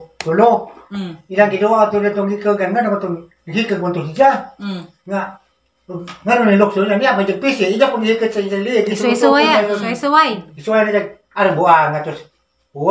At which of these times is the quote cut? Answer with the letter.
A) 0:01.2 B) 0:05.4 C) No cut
C